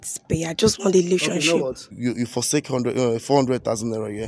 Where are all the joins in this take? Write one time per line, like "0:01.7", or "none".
0:01.9